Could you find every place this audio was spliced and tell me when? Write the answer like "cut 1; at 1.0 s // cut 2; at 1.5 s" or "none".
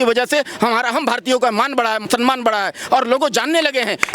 cut 1; at 2.0 s